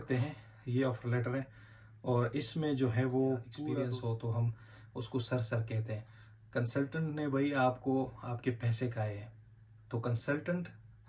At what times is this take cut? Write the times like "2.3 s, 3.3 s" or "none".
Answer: 3.8 s